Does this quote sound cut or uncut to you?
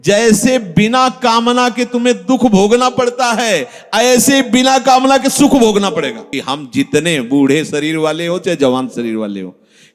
cut